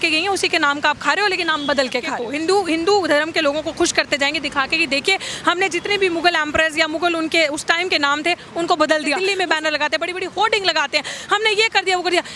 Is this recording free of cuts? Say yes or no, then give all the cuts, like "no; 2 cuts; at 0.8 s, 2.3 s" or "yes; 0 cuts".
no; 2 cuts; at 2.2 s, 9.2 s